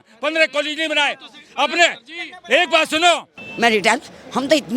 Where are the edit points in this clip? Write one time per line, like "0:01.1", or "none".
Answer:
0:03.4